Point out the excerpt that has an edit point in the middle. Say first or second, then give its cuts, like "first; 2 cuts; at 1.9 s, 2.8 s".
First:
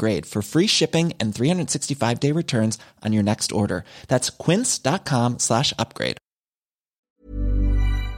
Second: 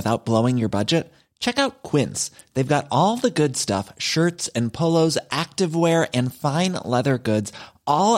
first; 1 cut; at 7.1 s